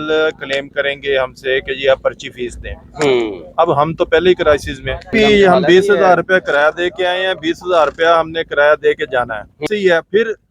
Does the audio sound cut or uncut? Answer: cut